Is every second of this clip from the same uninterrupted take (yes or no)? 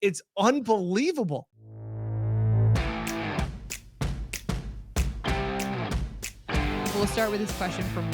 no